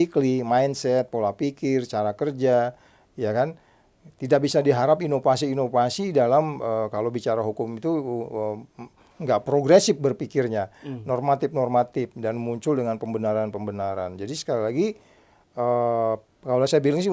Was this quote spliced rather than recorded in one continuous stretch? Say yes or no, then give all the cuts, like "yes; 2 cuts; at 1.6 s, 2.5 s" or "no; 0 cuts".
no; 0 cuts